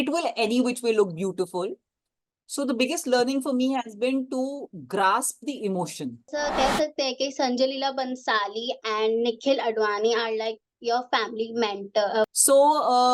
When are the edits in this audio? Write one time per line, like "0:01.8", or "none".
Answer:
0:06.2
0:12.3